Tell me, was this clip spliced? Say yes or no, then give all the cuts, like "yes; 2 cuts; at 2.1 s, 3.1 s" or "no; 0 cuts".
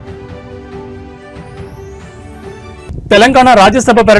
yes; 1 cut; at 2.9 s